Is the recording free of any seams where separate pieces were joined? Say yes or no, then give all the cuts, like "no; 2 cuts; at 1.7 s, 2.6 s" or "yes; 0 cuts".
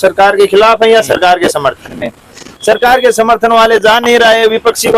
yes; 0 cuts